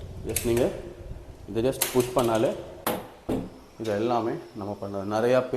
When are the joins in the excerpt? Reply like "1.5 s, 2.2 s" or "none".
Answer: 2.7 s